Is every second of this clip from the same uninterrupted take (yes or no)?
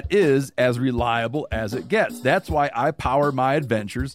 yes